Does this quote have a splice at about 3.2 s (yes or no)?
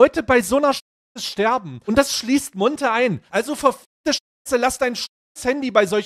yes